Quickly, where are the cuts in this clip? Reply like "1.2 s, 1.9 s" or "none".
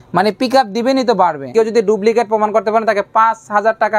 1.5 s

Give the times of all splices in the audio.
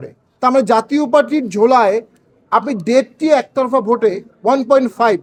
none

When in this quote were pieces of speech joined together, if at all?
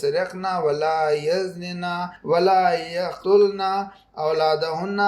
2.1 s, 3.1 s

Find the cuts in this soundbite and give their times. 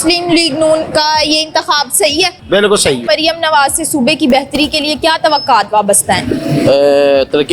3.0 s

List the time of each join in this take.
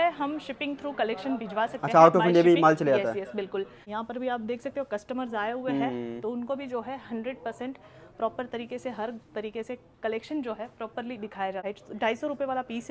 3.8 s, 11.6 s

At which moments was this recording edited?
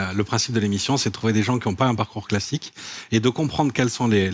none

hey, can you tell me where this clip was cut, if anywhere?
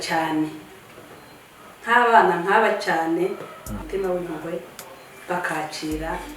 3.8 s

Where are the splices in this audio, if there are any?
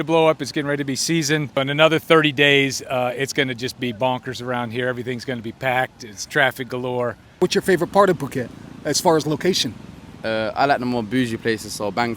1.6 s, 7.3 s

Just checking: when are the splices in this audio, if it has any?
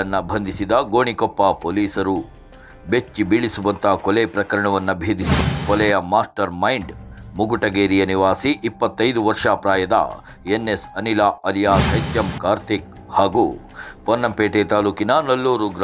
5.3 s, 11.9 s

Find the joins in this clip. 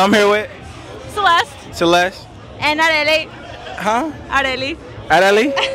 4.2 s

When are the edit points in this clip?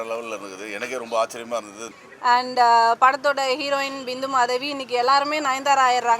1.8 s

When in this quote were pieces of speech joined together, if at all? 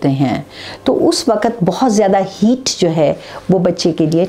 none

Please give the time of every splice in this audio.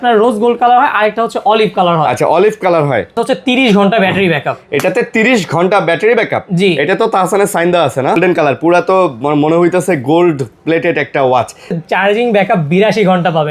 3.1 s, 8.2 s, 11.8 s

